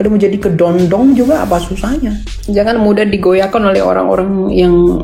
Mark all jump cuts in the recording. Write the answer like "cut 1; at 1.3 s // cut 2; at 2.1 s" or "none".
cut 1; at 2.3 s